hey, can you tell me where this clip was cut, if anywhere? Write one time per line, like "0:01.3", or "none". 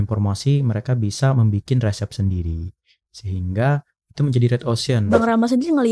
0:05.0

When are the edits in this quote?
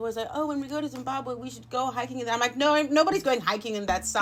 none

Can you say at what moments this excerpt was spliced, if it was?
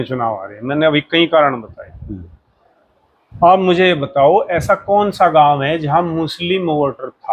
none

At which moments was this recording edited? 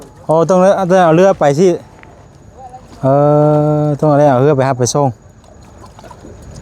none

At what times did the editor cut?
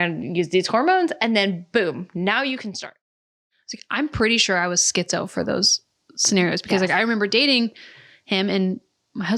0:03.2

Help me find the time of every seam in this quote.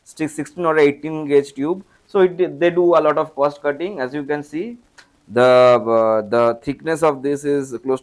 none

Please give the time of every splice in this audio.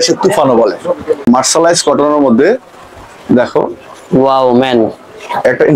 0:01.2

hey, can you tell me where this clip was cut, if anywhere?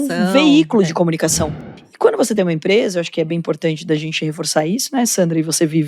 0:01.6

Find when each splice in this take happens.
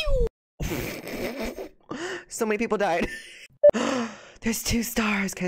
0:03.5

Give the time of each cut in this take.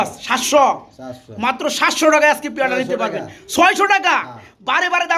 none

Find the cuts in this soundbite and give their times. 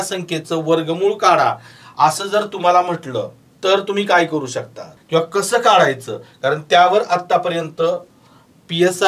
0:03.4
0:04.9

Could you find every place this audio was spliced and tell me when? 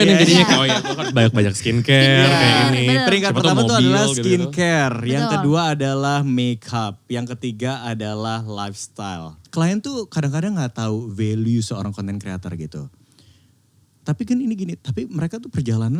0:09.4

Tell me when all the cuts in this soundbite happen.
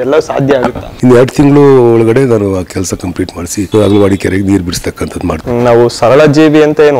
0:00.9
0:03.7
0:05.4

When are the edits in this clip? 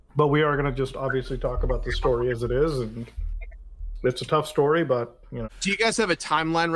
0:05.5

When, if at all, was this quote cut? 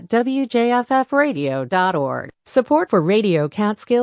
0:02.3

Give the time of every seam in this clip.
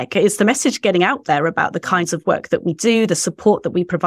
none

